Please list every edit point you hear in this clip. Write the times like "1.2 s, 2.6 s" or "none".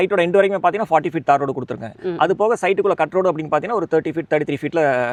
none